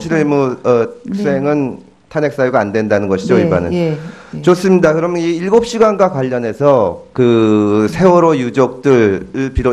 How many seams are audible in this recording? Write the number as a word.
one